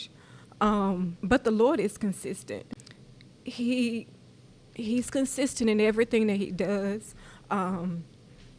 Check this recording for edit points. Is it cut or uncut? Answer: cut